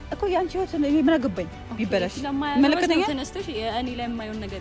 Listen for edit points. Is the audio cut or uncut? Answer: uncut